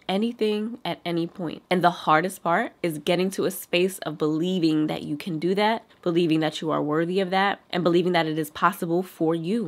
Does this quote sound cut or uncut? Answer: uncut